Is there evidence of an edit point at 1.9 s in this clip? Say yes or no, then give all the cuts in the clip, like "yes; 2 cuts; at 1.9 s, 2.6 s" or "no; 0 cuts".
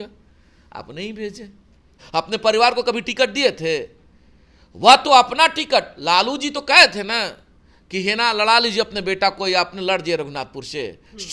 yes; 1 cut; at 1.9 s